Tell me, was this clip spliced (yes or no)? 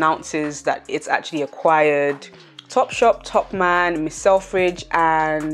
no